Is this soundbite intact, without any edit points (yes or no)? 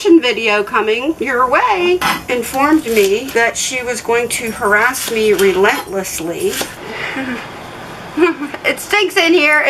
no